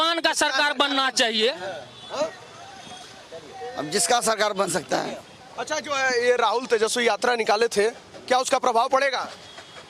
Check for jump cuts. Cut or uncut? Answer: uncut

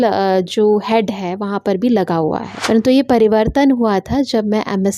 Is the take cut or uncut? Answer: cut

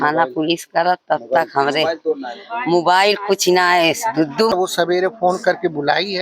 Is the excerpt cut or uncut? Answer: cut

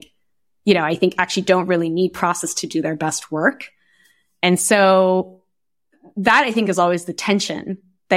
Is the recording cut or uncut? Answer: uncut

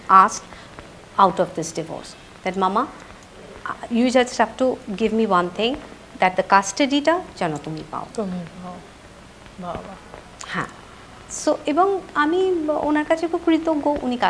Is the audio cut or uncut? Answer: uncut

